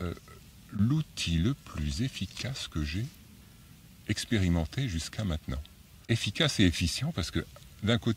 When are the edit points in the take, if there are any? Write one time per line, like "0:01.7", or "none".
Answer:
0:06.0